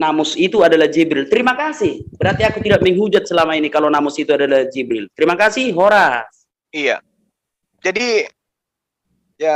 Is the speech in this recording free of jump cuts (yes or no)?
yes